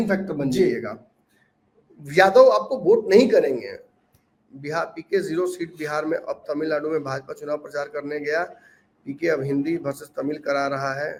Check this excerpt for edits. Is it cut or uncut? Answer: uncut